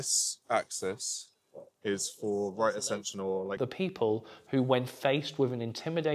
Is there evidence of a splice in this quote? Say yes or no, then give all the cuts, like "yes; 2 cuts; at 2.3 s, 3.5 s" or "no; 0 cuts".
yes; 1 cut; at 3.6 s